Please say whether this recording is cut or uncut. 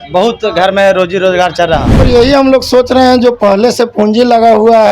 cut